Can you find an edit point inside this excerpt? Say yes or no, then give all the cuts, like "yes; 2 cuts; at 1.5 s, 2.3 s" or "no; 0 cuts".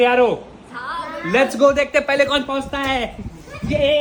no; 0 cuts